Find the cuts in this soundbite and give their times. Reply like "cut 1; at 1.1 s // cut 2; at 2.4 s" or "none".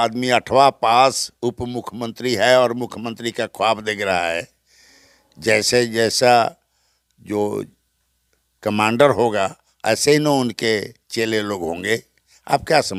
none

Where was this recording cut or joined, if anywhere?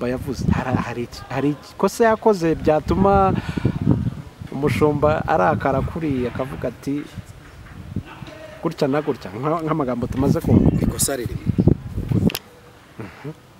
cut 1; at 12.3 s

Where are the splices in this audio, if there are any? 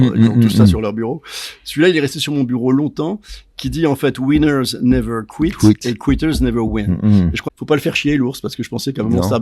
cut 1; at 7.4 s

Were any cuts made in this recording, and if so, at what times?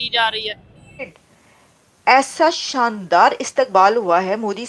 cut 1; at 1.1 s

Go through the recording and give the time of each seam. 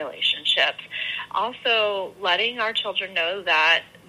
cut 1; at 1.3 s

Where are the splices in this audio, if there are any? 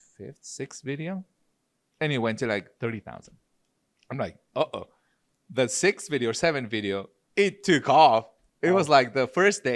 none

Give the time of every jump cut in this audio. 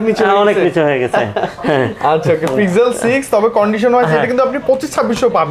none

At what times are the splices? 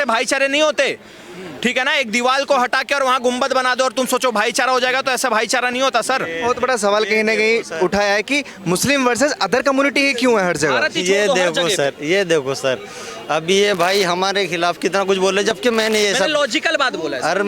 none

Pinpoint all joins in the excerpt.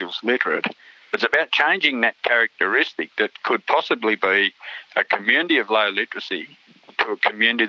none

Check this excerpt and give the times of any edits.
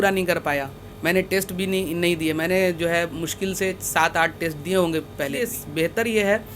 cut 1; at 5.5 s

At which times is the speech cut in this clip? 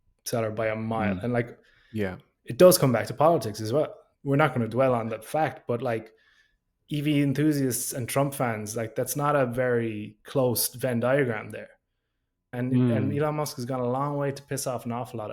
cut 1; at 4.1 s // cut 2; at 12.5 s

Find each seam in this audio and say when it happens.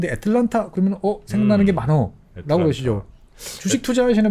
none

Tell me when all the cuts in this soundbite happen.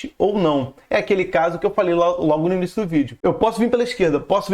cut 1; at 3.1 s

